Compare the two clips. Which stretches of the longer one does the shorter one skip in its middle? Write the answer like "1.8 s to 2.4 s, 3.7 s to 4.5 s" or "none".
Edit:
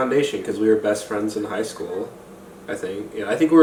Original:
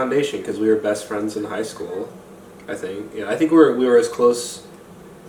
none

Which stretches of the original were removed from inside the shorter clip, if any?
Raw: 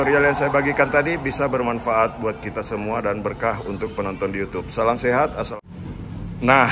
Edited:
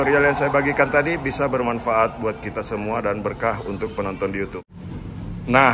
4.6 s to 5.6 s

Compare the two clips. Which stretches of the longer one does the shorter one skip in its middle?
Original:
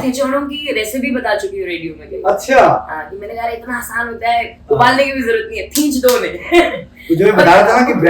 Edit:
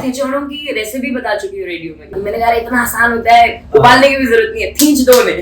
2.1 s to 3.1 s

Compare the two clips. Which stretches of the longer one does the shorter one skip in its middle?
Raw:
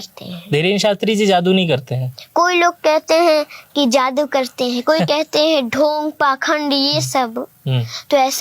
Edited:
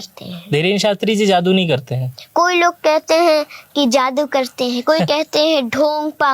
none

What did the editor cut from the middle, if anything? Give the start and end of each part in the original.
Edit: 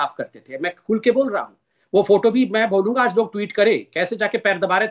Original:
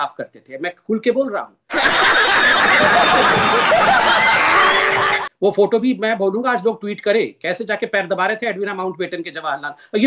1.7 s to 5.2 s

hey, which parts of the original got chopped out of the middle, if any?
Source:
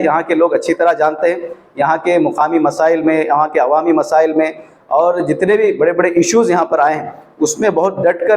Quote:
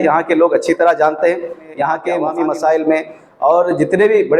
2.2 s to 3.7 s

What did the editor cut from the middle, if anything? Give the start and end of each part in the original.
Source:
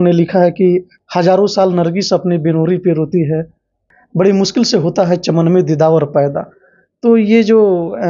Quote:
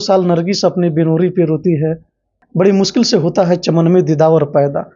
4.1 s to 4.2 s

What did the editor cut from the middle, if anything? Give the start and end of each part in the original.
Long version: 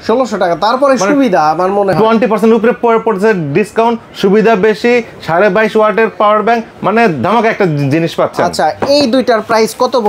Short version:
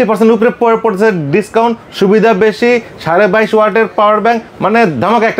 none

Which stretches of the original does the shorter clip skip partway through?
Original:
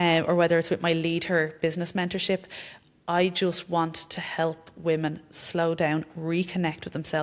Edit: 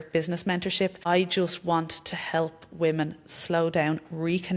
2.5 s to 3.0 s

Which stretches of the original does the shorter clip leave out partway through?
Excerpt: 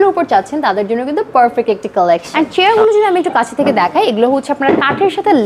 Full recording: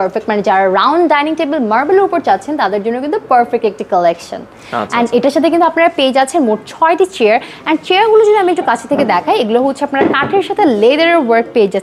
4.2 s to 7.6 s

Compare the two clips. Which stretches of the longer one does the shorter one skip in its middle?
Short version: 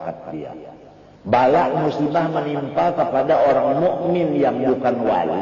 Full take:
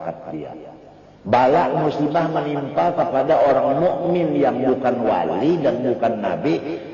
none

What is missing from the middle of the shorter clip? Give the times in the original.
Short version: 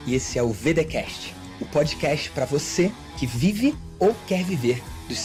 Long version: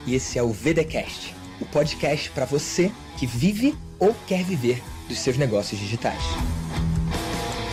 none

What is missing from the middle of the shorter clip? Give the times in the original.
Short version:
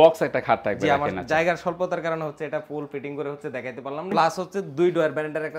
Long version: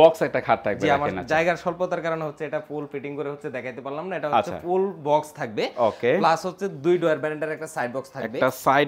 4.1 s to 6.2 s

